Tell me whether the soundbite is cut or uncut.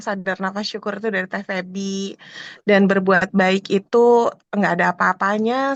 uncut